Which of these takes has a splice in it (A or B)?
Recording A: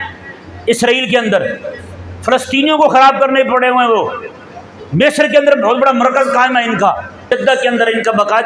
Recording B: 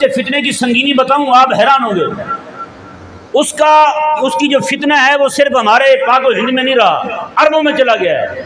A